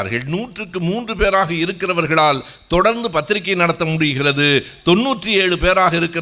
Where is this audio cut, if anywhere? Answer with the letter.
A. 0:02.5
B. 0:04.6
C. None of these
C